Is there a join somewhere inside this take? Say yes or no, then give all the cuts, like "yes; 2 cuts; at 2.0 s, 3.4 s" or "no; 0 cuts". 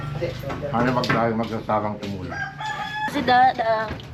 yes; 1 cut; at 3.1 s